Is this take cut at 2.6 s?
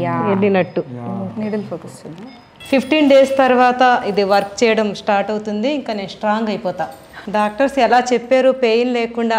yes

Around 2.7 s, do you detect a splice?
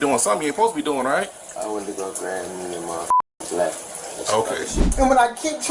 no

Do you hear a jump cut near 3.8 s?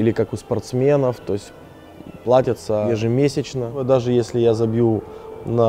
yes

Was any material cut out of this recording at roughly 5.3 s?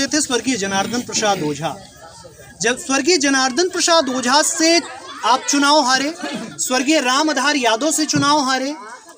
no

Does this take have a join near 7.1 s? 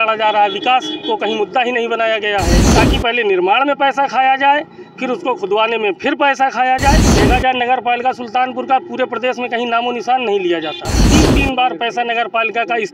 yes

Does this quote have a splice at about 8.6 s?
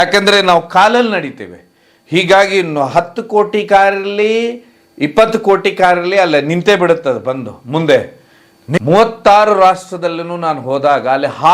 yes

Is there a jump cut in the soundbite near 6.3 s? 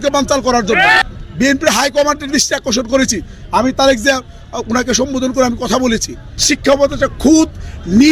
yes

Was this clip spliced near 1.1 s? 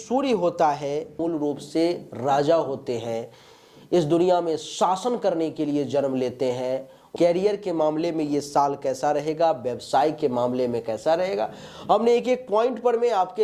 yes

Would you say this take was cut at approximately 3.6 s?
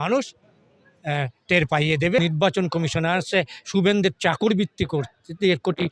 no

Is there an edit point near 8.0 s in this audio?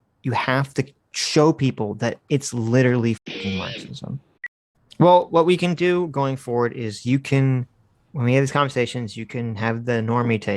no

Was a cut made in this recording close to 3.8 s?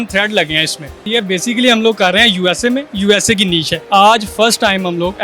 yes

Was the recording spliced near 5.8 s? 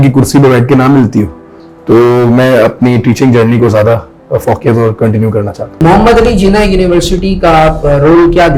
yes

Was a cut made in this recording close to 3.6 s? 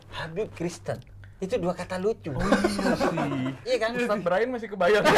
yes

